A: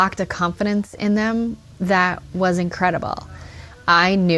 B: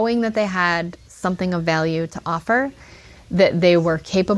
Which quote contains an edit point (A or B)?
A